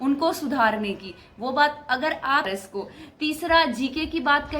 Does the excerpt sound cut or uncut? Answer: cut